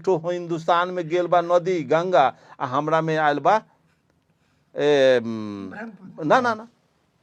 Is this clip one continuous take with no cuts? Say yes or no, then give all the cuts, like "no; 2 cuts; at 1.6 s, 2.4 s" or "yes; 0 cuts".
yes; 0 cuts